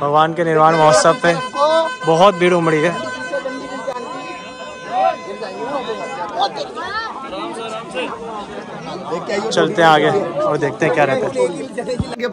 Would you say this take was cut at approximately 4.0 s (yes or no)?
no